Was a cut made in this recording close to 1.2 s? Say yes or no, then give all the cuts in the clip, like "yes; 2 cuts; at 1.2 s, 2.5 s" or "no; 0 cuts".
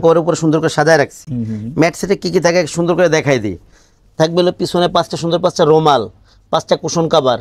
no; 0 cuts